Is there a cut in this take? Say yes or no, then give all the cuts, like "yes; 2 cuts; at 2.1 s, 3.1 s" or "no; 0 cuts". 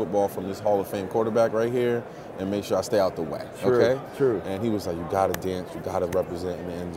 no; 0 cuts